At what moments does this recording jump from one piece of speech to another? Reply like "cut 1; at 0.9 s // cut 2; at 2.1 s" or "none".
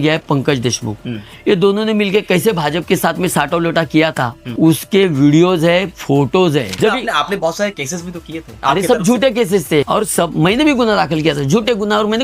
cut 1; at 6.8 s // cut 2; at 9.9 s